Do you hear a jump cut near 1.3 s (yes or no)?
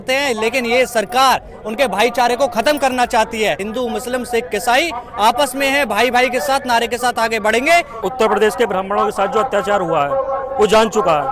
no